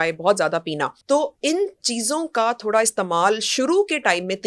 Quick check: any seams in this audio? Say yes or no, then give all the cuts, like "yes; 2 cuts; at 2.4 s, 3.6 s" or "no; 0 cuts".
yes; 1 cut; at 0.9 s